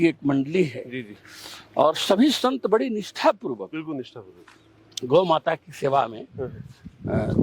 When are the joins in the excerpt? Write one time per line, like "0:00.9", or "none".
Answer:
none